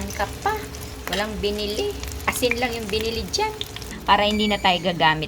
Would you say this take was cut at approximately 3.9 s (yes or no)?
yes